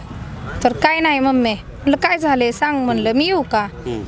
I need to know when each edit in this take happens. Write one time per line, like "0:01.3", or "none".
none